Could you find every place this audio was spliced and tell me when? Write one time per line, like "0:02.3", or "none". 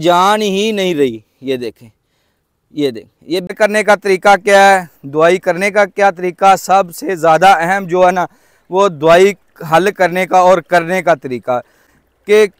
0:03.5